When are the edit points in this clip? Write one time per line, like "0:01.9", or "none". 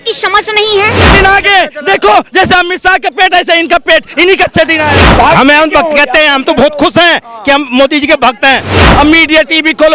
0:01.0
0:05.0
0:08.9